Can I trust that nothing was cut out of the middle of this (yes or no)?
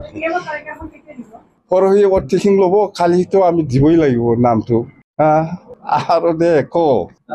no